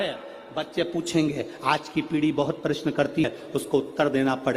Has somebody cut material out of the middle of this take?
yes; 1 cut; at 3.2 s

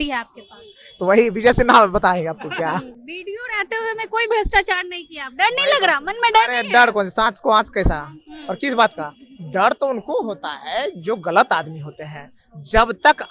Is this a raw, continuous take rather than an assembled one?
no; 1 cut; at 3.0 s

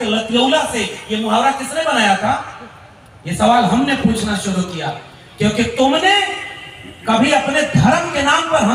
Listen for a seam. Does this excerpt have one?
no; 0 cuts

